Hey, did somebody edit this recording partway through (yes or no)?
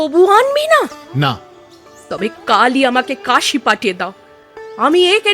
yes